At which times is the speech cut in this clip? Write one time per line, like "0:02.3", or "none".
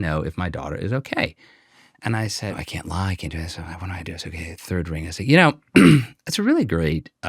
0:02.6